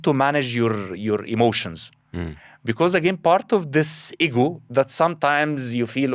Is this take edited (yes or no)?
no